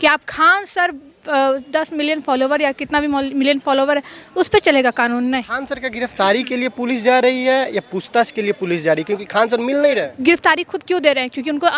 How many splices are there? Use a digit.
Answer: 2